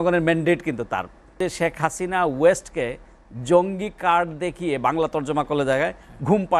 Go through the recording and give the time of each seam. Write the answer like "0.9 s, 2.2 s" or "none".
1.4 s